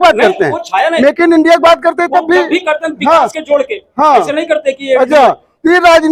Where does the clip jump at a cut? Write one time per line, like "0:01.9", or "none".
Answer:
none